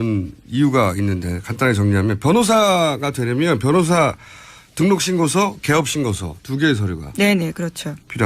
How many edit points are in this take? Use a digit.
1